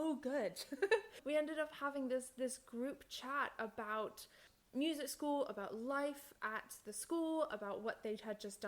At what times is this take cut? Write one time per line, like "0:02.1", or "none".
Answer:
0:01.2
0:04.5